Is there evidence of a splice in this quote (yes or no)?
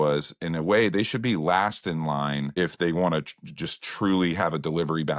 no